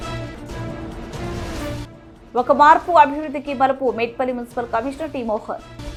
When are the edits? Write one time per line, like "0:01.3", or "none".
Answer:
none